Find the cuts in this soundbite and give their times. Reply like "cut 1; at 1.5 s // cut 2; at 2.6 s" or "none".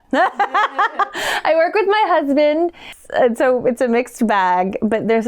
cut 1; at 2.9 s